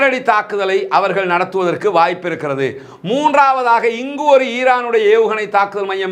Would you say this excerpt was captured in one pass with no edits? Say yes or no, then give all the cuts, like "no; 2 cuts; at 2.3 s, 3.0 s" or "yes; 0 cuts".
yes; 0 cuts